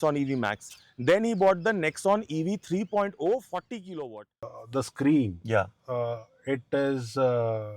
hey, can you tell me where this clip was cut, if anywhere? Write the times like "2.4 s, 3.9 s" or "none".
4.5 s